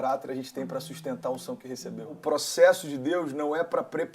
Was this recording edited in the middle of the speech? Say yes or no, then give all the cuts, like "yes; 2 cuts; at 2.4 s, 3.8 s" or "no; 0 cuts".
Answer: yes; 1 cut; at 2.2 s